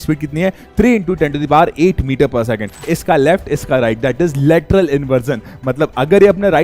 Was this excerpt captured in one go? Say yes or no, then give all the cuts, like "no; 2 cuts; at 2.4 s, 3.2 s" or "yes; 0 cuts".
no; 1 cut; at 2.9 s